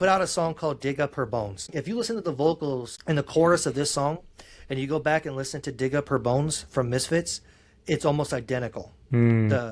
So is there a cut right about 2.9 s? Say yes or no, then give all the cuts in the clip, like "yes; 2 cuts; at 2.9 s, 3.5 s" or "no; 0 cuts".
yes; 2 cuts; at 1.7 s, 2.9 s